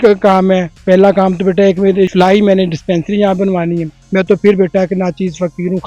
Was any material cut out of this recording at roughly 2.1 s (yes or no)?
yes